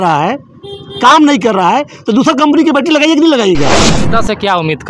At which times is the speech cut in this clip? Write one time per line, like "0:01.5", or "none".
0:03.9